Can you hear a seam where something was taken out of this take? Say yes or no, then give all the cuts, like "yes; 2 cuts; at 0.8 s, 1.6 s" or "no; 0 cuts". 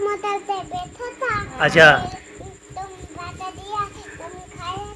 no; 0 cuts